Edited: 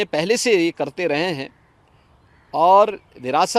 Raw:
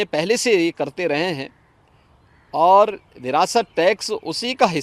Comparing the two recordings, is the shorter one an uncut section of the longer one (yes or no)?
yes